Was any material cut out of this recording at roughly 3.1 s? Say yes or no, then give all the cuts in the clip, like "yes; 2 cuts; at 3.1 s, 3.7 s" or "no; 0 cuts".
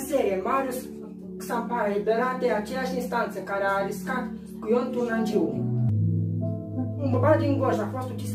no; 1 cut; at 5.8 s